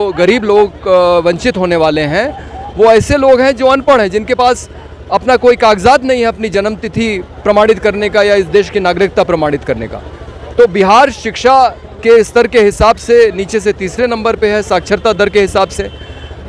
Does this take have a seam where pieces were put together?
no; 0 cuts

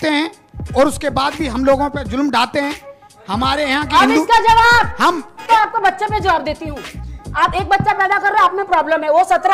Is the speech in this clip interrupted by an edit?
no; 0 cuts

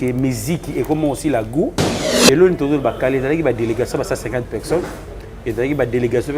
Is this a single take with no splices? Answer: no; 1 cut; at 2.0 s

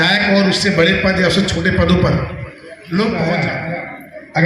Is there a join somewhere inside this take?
yes; 1 cut; at 3.5 s

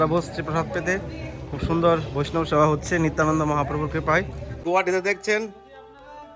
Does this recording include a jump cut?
yes; 1 cut; at 4.6 s

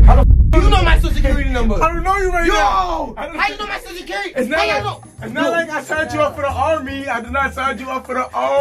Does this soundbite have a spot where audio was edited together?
no; 0 cuts

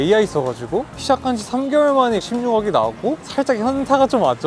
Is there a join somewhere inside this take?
yes; 2 cuts; at 1.0 s, 3.2 s

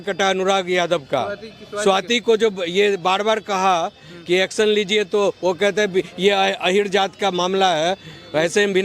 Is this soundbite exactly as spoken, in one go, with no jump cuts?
yes; 0 cuts

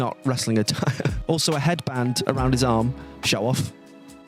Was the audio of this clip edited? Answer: no; 0 cuts

